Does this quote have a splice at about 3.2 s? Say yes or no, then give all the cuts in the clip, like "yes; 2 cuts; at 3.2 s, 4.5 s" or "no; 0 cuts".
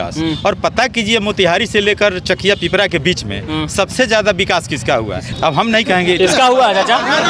no; 1 cut; at 5.2 s